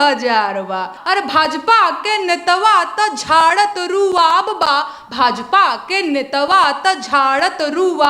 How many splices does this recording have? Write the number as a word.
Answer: one